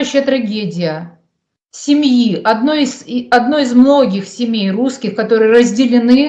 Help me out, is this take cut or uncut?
uncut